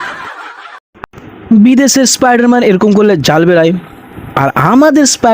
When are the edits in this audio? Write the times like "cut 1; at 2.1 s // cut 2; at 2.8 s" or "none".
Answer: cut 1; at 1.0 s